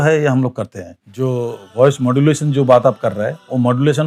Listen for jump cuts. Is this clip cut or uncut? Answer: cut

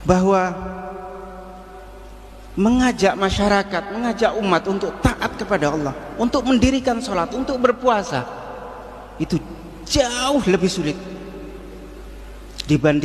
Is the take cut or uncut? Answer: cut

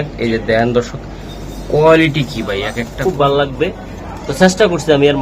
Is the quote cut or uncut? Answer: cut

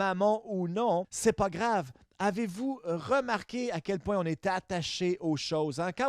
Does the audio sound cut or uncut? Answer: cut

